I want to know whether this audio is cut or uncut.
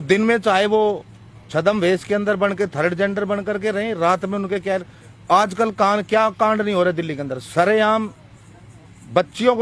uncut